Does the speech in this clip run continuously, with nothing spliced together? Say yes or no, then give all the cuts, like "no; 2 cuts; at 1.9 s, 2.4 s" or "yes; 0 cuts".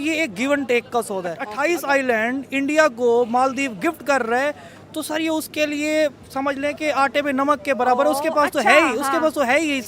no; 1 cut; at 1.4 s